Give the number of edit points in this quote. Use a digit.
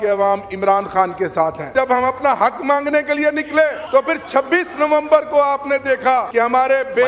3